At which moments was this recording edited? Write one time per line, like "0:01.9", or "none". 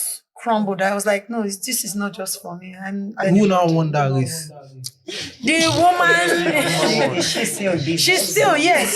0:03.2